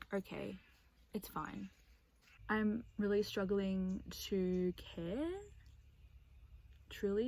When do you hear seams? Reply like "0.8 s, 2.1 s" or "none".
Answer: 2.4 s